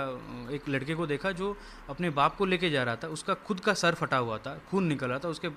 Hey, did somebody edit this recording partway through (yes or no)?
no